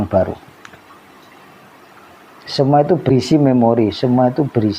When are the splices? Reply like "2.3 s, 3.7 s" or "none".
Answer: 3.1 s